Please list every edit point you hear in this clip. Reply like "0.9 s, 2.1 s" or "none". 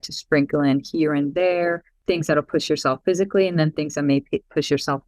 1.9 s

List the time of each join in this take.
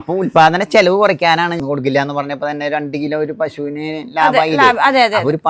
1.6 s

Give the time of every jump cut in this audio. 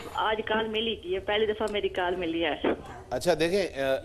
1.8 s

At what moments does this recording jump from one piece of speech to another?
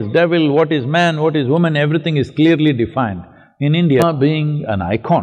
4.0 s

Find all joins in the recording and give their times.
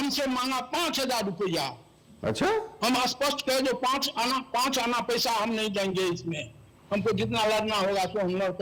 none

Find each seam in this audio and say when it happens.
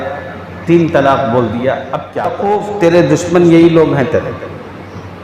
2.4 s

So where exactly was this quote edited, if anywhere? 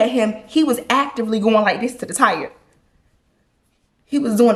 none

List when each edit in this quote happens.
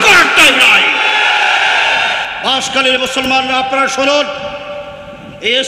2.3 s

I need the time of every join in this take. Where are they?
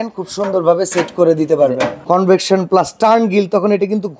2.0 s

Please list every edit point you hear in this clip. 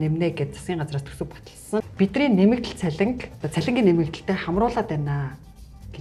1.8 s, 3.3 s

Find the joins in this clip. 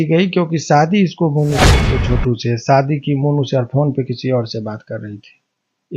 1.9 s

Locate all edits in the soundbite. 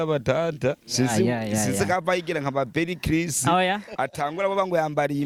none

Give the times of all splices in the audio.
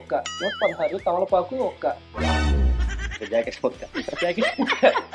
3.1 s

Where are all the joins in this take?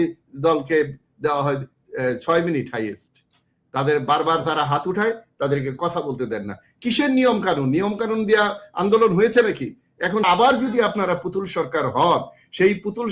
10.2 s

